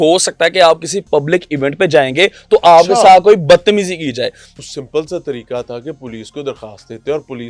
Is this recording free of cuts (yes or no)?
no